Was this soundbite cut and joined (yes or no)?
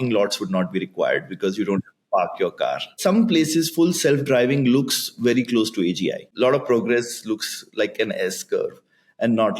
yes